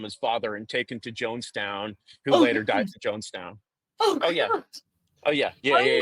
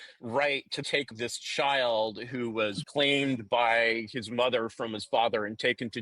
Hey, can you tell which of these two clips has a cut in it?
second; 2 cuts; at 1.0 s, 2.8 s

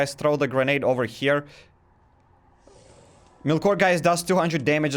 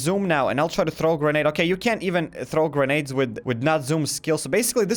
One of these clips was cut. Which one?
first; 1 cut; at 3.4 s

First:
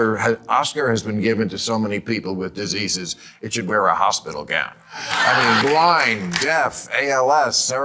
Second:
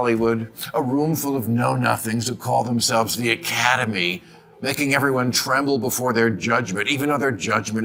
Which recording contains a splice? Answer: first; 1 cut; at 5.6 s

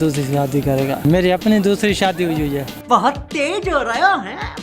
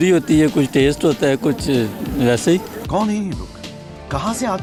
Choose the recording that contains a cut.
first; 1 cut; at 1.0 s

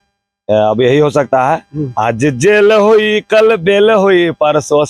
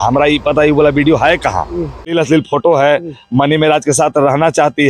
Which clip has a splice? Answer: second; 1 cut; at 2.0 s

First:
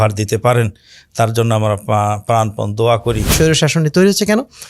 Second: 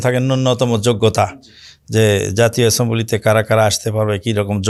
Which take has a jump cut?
first; 1 cut; at 3.3 s

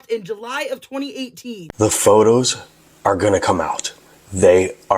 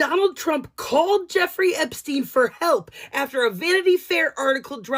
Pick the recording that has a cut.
first; 1 cut; at 1.7 s

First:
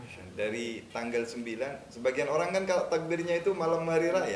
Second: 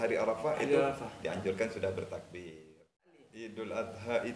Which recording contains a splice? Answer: second; 1 cut; at 3.3 s

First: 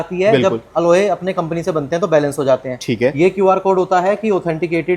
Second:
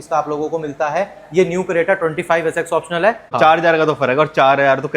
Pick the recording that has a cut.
second; 1 cut; at 3.3 s

